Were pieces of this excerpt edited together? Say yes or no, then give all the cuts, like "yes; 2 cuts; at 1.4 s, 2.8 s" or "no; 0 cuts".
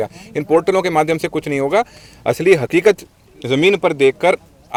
no; 0 cuts